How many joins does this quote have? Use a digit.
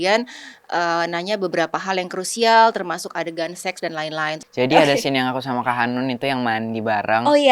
1